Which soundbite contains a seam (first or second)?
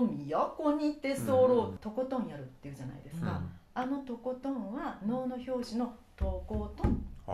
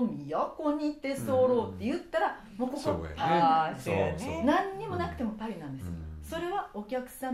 first